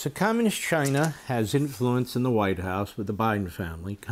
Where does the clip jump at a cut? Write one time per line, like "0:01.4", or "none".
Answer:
none